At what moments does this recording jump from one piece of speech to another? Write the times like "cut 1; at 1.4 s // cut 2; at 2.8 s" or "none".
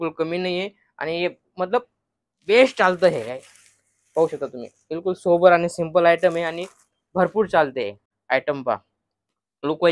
cut 1; at 8.1 s